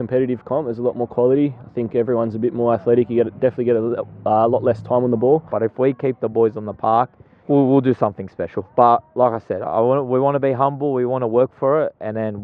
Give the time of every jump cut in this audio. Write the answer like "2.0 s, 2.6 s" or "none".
5.5 s, 7.3 s